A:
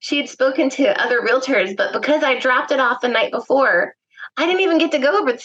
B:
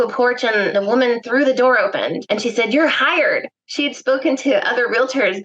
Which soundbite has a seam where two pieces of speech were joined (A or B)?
B